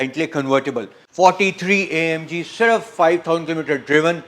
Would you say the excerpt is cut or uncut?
cut